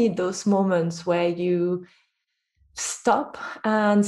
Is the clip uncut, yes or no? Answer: yes